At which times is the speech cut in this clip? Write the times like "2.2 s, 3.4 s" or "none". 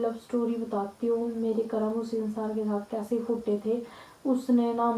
none